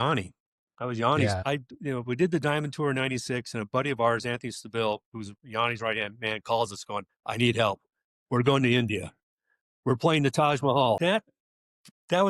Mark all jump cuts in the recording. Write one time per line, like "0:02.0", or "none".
0:01.4
0:11.0